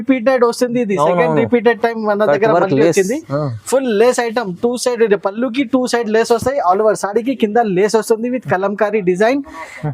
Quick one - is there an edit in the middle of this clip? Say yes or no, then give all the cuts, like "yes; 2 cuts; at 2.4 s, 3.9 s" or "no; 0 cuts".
no; 0 cuts